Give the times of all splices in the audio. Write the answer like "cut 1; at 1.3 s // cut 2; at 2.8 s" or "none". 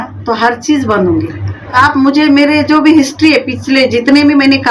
cut 1; at 1.8 s